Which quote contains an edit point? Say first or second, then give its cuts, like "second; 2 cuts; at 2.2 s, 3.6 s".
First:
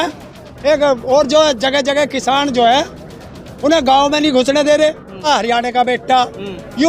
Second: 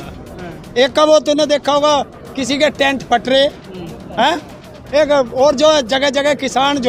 first; 1 cut; at 5.2 s